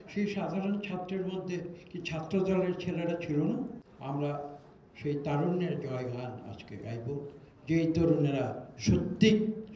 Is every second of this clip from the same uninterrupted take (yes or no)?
no